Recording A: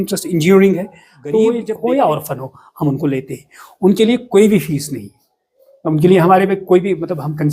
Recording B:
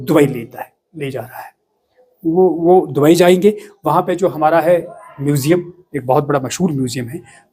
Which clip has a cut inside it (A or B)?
A